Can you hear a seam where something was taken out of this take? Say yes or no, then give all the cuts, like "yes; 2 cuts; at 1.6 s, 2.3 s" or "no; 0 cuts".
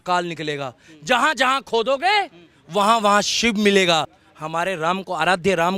yes; 1 cut; at 4.2 s